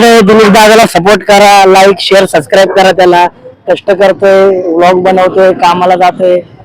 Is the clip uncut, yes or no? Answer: yes